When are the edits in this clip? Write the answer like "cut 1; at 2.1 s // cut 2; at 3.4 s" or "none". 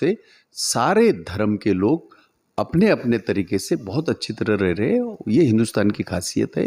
none